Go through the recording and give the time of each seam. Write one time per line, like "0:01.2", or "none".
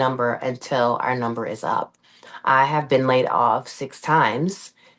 none